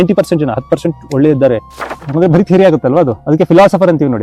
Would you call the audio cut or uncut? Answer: cut